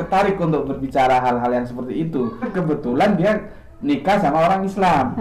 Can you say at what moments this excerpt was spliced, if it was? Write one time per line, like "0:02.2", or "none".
0:02.5